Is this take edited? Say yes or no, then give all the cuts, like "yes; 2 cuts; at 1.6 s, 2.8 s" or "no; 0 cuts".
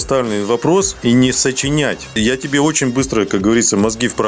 yes; 1 cut; at 2.1 s